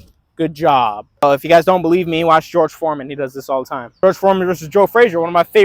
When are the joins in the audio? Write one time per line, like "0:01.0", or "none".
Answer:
0:01.2
0:04.0